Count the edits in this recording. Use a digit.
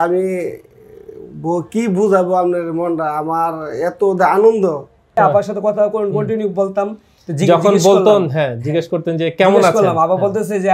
1